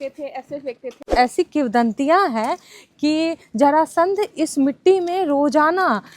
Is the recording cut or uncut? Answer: cut